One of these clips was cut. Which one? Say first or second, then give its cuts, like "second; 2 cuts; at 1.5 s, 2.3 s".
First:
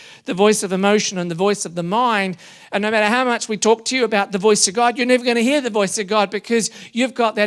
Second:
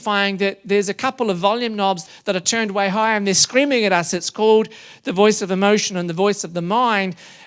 second; 1 cut; at 2.0 s